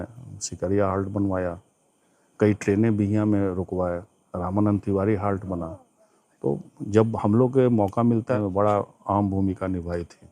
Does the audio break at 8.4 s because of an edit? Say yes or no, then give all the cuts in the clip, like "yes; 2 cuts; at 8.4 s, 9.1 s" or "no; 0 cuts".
yes; 1 cut; at 8.4 s